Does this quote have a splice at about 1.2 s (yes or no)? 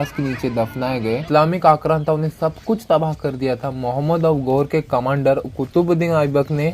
yes